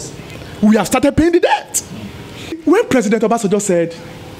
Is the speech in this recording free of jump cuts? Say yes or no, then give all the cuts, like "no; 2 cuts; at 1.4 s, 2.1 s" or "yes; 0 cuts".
no; 1 cut; at 2.6 s